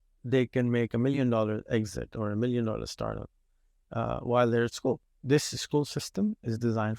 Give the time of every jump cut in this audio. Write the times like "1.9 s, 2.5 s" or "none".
5.1 s